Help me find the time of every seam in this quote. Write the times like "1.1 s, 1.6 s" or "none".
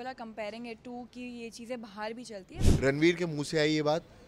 2.5 s